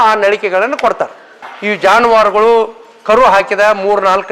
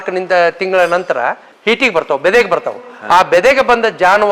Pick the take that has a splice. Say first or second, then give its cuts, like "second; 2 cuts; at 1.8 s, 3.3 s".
first; 1 cut; at 1.5 s